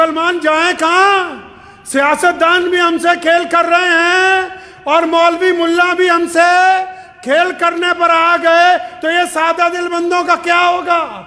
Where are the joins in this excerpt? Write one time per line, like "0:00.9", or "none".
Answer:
none